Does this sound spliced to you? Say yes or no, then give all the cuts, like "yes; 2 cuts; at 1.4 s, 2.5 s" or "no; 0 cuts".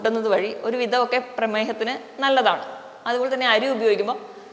no; 0 cuts